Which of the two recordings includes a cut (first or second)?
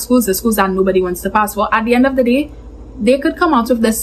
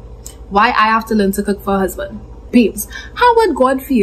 second